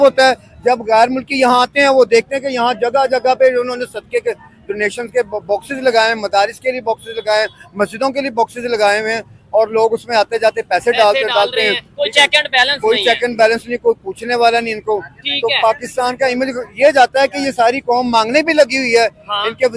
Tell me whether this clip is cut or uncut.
uncut